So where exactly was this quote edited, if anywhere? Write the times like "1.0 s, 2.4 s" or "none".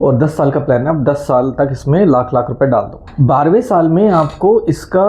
3.0 s